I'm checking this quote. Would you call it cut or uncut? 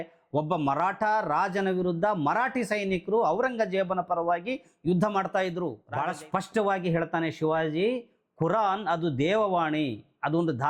cut